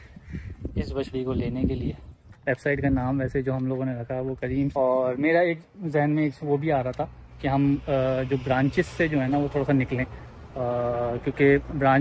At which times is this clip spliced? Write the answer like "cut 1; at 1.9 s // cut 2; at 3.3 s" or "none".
cut 1; at 2.2 s // cut 2; at 4.7 s